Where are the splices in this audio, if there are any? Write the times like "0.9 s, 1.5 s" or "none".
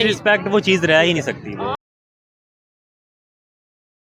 none

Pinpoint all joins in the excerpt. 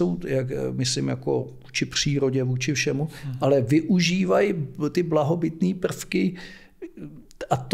none

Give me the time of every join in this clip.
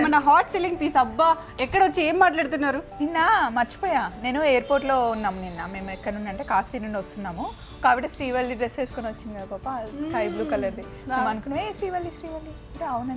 2.9 s

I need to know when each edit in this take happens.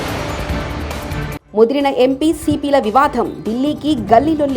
1.3 s

